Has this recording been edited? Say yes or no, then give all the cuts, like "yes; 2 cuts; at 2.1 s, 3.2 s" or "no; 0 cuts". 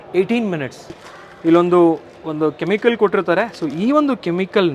yes; 1 cut; at 1.0 s